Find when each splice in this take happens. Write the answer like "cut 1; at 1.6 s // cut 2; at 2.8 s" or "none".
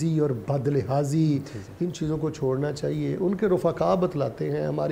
none